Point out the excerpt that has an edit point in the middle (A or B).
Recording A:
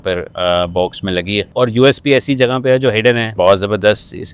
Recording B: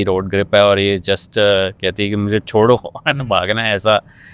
A